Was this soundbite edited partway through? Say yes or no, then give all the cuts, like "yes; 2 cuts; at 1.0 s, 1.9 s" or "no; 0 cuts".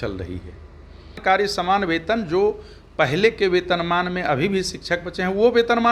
yes; 1 cut; at 1.2 s